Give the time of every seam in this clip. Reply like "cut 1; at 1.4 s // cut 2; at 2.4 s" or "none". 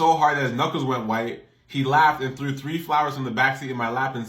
cut 1; at 1.3 s